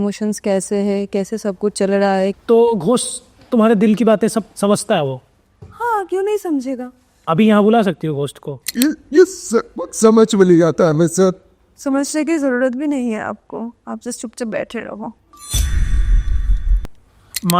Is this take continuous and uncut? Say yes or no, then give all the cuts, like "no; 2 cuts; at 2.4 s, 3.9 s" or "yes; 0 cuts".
no; 2 cuts; at 2.4 s, 8.6 s